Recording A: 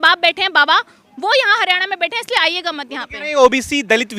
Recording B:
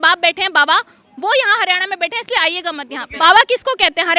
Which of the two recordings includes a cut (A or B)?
B